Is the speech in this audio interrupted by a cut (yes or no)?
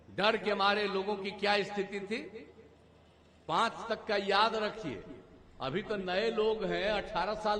no